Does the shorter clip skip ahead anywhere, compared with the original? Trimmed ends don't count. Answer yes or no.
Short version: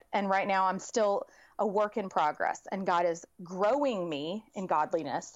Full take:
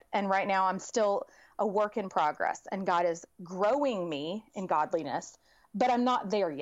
no